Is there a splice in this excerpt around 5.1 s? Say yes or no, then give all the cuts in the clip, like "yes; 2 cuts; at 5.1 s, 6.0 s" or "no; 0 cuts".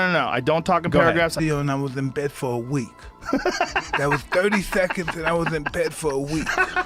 no; 1 cut; at 1.3 s